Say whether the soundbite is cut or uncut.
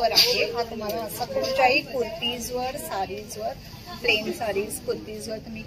uncut